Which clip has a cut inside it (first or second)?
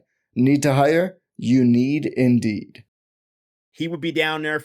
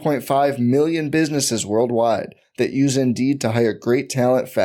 first